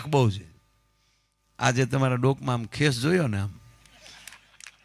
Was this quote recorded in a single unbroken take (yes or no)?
yes